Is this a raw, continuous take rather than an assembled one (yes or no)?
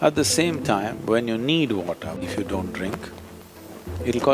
no